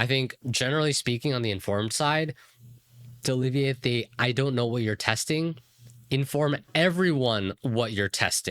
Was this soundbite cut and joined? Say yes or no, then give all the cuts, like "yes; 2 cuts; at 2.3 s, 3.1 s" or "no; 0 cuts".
yes; 1 cut; at 6.7 s